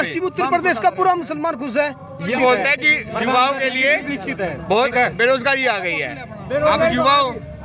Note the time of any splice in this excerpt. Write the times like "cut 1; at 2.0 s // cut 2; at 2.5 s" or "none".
cut 1; at 2.3 s

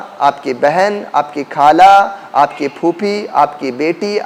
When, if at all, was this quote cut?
none

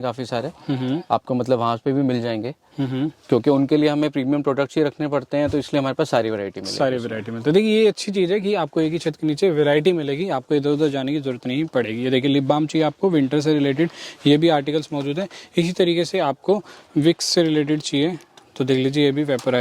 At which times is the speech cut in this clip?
none

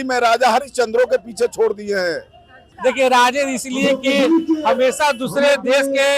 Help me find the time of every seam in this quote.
cut 1; at 2.6 s

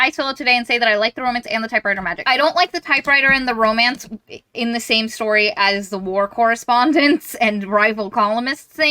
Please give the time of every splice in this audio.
cut 1; at 2.2 s

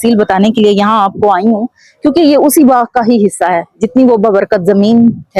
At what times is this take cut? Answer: none

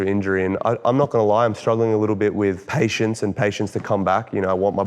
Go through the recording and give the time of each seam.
cut 1; at 2.6 s

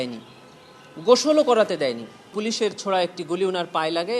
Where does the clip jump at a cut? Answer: cut 1; at 2.3 s

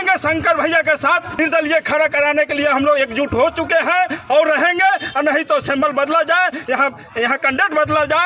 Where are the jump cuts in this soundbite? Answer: cut 1; at 1.4 s

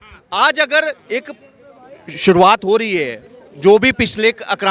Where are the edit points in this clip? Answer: none

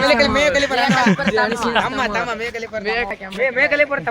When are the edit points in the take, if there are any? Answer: cut 1; at 3.1 s

